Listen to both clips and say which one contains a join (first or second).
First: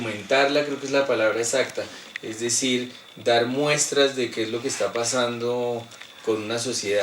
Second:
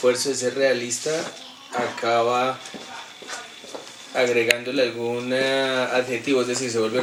first